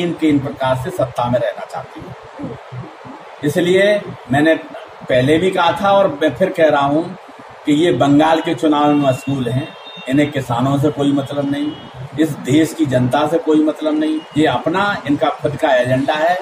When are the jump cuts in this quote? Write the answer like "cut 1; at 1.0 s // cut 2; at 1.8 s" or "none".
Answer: none